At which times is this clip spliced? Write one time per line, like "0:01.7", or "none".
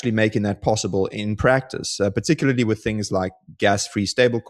none